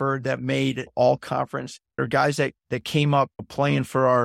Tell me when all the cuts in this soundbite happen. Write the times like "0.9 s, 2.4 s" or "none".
1.8 s